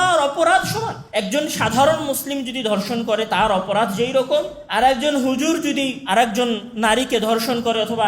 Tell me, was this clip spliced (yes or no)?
yes